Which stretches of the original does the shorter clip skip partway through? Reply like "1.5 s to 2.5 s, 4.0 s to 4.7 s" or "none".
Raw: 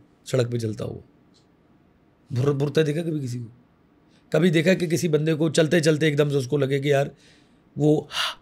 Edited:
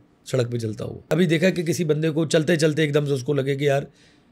0.9 s to 4.2 s